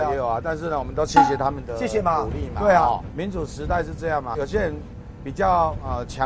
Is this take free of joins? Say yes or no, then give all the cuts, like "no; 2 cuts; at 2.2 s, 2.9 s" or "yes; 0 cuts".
no; 2 cuts; at 3.1 s, 4.3 s